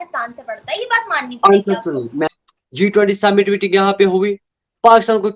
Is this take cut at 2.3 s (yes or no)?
yes